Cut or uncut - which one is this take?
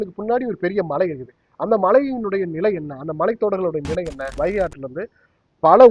cut